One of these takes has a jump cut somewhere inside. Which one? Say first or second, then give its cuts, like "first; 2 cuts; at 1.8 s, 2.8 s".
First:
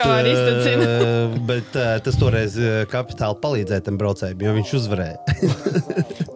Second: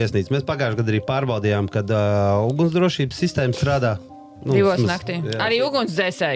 second; 1 cut; at 5.4 s